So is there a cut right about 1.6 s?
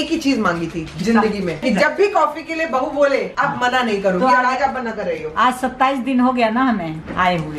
yes; 1 cut; at 1.6 s

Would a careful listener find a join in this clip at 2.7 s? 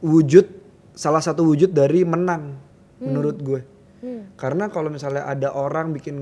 no; 0 cuts

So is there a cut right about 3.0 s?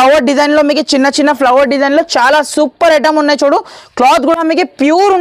no; 0 cuts

